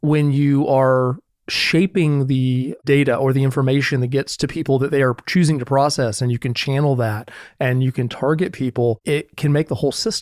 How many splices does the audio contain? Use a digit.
2